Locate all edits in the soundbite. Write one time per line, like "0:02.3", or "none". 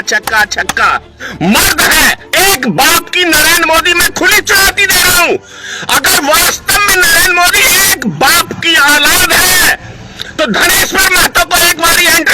0:01.2

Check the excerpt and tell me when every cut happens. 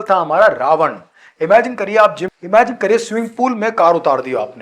0:02.3

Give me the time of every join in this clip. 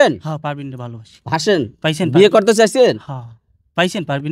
none

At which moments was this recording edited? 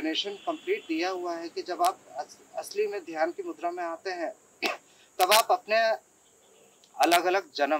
none

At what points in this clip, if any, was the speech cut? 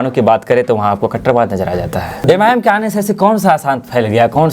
0:02.2

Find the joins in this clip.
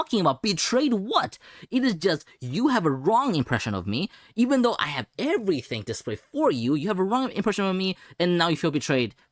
none

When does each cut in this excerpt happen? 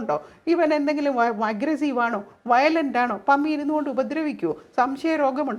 none

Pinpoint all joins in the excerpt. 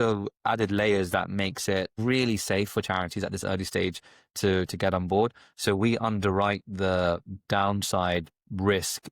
0:01.9

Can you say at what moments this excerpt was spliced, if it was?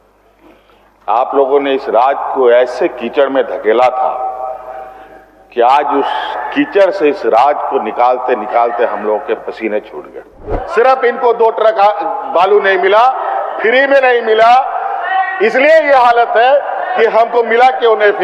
0:10.5

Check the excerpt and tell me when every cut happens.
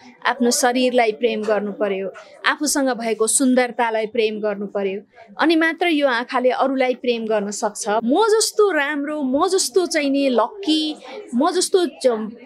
0:08.0

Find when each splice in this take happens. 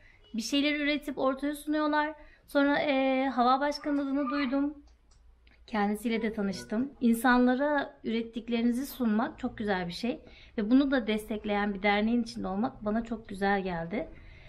0:06.9

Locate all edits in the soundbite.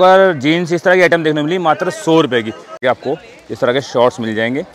0:02.8

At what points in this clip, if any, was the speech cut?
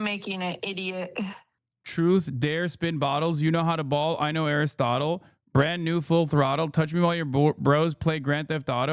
0:01.4

